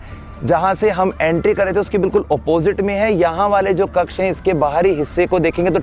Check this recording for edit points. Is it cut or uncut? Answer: uncut